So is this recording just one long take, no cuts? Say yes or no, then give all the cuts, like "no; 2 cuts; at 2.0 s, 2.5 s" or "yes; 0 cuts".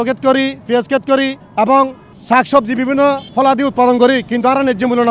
yes; 0 cuts